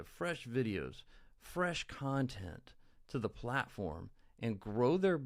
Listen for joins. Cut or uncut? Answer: uncut